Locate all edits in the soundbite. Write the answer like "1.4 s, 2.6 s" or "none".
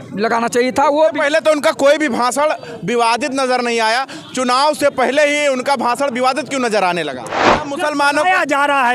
7.6 s